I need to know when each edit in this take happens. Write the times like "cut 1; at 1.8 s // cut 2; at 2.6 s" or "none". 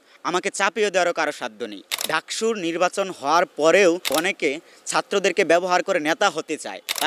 cut 1; at 1.9 s // cut 2; at 4.1 s